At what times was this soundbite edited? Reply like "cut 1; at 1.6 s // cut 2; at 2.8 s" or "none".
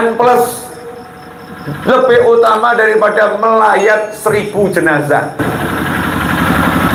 none